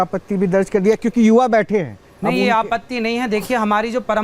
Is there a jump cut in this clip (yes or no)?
yes